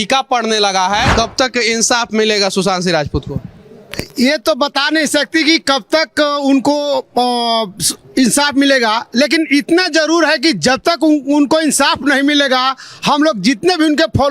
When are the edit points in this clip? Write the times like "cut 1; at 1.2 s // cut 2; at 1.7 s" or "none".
cut 1; at 1.1 s